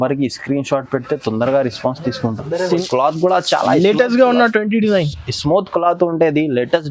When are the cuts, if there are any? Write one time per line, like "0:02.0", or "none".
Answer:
0:02.7